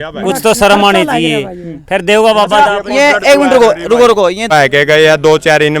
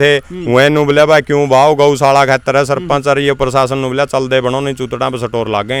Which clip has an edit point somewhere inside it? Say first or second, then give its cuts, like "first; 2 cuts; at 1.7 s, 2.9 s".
first; 1 cut; at 4.5 s